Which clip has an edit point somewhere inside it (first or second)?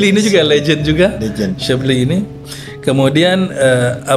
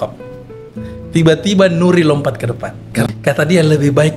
second